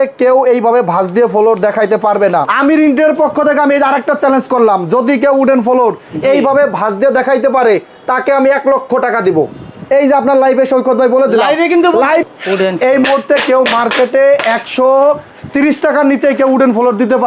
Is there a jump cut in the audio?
yes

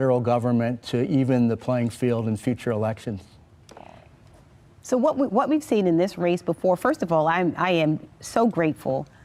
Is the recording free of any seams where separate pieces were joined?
yes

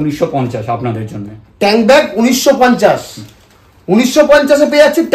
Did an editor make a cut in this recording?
no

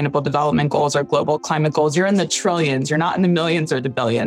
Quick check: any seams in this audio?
no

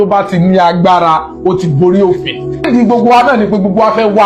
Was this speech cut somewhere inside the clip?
yes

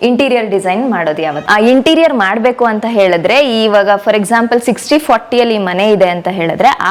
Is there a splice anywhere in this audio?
yes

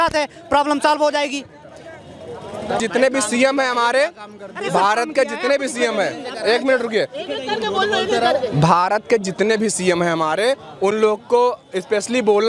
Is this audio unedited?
yes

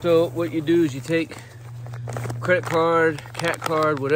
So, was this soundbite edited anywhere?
no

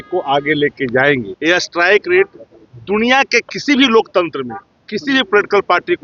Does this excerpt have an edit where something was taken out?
yes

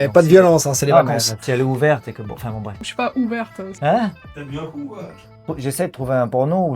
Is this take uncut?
no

